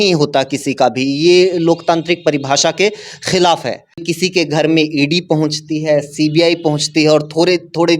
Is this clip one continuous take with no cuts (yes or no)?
no